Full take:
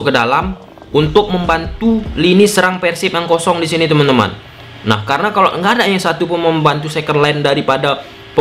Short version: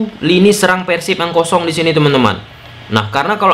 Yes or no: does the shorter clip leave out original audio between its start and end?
no